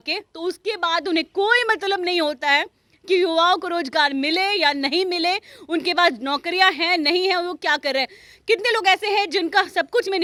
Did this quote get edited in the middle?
no; 0 cuts

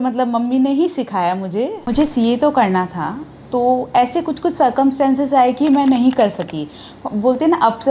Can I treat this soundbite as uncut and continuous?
no; 1 cut; at 1.9 s

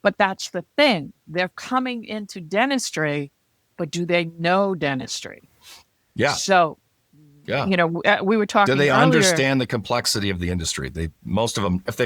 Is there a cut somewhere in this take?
no; 0 cuts

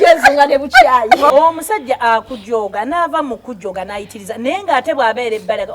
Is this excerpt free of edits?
no; 1 cut; at 1.3 s

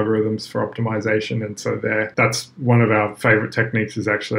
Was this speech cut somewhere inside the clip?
yes; 1 cut; at 2.1 s

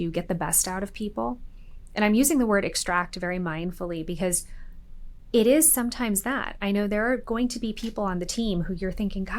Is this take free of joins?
yes; 0 cuts

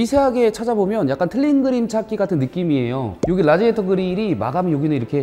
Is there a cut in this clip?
no; 0 cuts

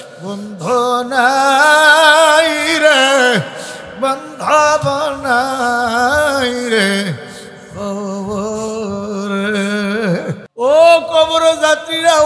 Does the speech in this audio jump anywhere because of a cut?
yes; 1 cut; at 10.4 s

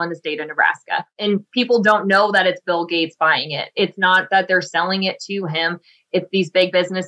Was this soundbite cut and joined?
yes; 1 cut; at 1.1 s

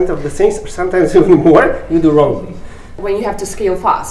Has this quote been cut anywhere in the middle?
yes; 1 cut; at 2.9 s

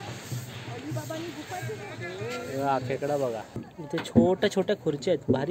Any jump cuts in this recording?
yes; 1 cut; at 3.7 s

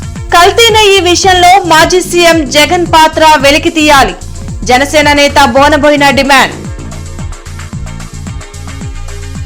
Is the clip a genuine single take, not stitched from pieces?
yes; 0 cuts

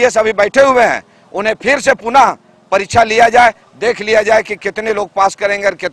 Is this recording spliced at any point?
no; 0 cuts

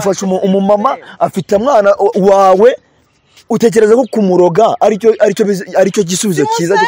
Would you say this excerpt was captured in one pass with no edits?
yes; 0 cuts

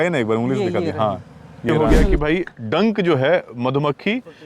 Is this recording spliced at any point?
yes; 1 cut; at 1.7 s

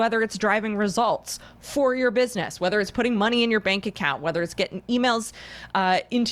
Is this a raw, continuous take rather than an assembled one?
yes; 0 cuts

